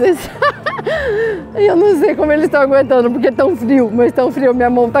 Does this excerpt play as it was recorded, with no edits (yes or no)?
yes